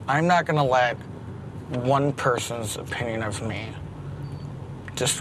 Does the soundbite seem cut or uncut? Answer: uncut